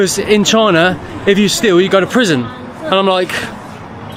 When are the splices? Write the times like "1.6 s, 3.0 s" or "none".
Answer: none